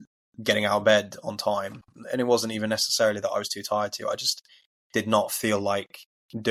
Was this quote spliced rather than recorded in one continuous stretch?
no; 0 cuts

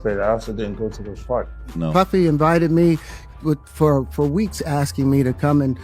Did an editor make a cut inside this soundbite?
yes; 1 cut; at 1.8 s

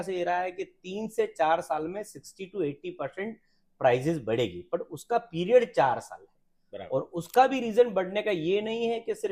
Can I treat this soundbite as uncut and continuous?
yes; 0 cuts

